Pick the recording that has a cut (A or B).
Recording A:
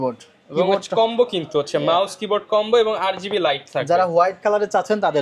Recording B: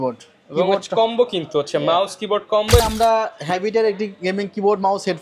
B